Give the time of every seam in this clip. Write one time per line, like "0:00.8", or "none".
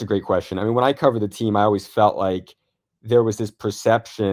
none